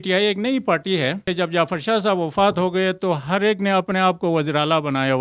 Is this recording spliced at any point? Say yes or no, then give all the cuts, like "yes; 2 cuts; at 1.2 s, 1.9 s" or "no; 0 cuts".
yes; 1 cut; at 1.2 s